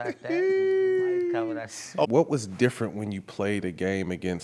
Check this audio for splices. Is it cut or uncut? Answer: cut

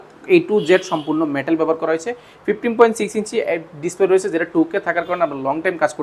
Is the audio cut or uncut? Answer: uncut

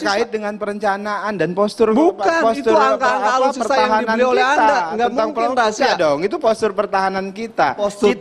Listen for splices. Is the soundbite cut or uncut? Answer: uncut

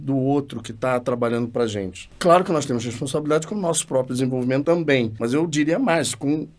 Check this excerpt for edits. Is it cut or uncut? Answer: cut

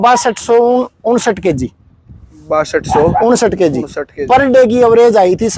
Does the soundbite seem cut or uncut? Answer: uncut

